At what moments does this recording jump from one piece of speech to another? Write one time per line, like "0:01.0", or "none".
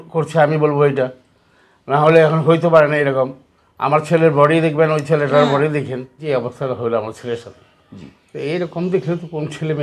0:06.2